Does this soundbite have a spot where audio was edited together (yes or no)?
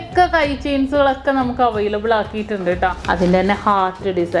yes